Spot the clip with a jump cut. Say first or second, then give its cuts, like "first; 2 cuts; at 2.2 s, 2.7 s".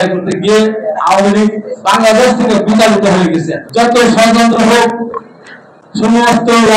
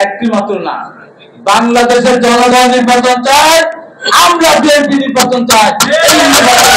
first; 1 cut; at 3.6 s